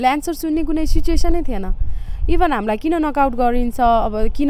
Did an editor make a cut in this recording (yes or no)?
no